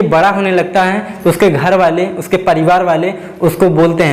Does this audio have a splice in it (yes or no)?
no